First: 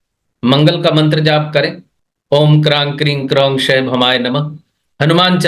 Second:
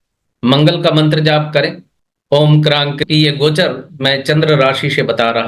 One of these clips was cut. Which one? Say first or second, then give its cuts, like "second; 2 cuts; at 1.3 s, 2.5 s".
second; 1 cut; at 3.0 s